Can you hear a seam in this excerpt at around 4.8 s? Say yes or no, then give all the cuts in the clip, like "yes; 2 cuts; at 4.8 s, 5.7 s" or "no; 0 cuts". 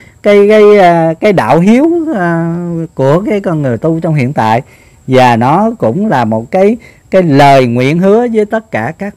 no; 0 cuts